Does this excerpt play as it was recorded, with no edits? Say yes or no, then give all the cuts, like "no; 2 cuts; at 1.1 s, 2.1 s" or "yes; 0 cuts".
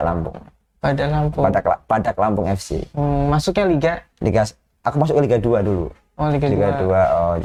yes; 0 cuts